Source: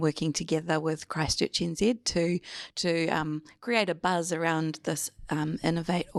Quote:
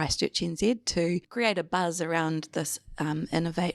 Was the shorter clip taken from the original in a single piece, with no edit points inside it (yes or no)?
no